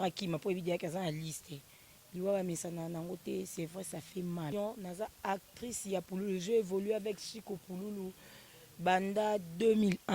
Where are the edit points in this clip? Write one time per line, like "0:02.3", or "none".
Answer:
0:04.5